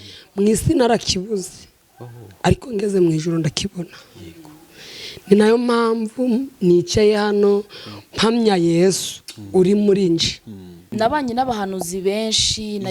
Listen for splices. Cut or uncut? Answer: cut